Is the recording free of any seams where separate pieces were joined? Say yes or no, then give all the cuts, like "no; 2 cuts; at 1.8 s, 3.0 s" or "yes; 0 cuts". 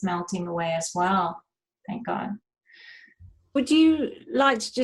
yes; 0 cuts